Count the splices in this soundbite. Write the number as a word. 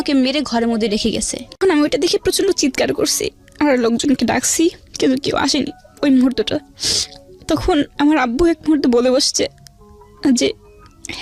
one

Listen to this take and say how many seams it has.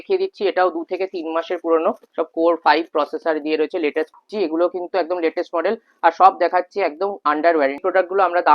two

